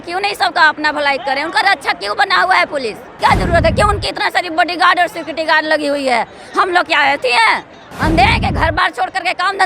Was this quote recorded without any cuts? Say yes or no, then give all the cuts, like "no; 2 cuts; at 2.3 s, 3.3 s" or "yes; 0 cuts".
no; 1 cut; at 3.1 s